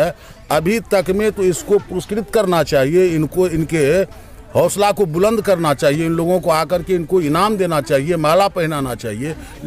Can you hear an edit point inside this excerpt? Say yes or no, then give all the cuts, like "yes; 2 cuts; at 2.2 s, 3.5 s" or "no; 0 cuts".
no; 0 cuts